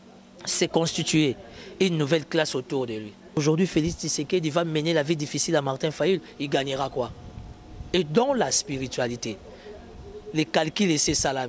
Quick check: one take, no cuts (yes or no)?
no